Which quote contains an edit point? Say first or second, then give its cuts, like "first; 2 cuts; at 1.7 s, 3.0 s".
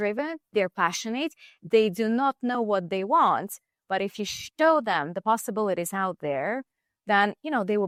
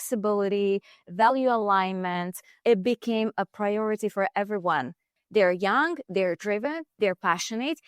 second; 2 cuts; at 2.6 s, 5.1 s